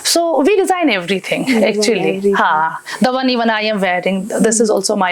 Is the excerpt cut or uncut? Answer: uncut